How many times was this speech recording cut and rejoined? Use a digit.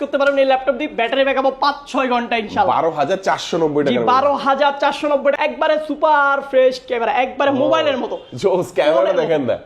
1